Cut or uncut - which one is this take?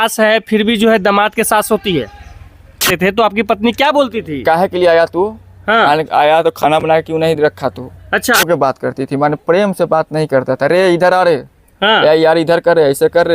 cut